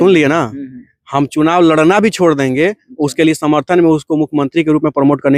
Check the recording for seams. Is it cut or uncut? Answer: uncut